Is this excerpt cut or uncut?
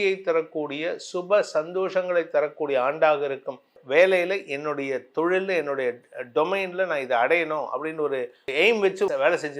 cut